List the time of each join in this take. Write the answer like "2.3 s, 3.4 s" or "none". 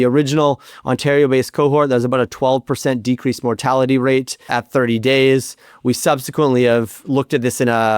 4.4 s